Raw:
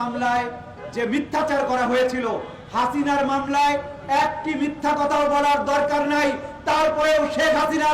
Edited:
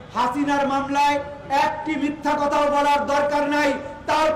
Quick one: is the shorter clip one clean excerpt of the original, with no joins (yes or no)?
yes